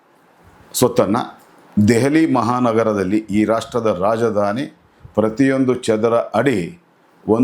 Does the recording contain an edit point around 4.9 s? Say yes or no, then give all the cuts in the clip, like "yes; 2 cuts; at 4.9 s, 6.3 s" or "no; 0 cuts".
no; 0 cuts